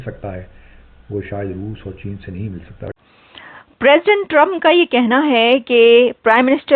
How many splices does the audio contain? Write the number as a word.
one